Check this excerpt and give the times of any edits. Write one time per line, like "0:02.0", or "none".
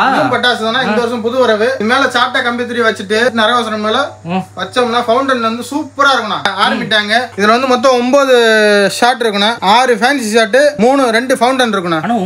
0:01.8
0:03.3
0:06.4